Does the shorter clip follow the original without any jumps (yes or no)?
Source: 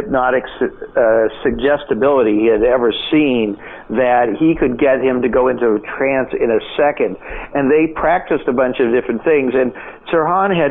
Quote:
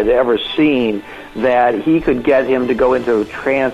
yes